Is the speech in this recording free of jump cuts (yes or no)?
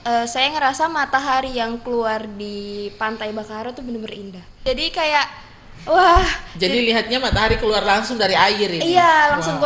no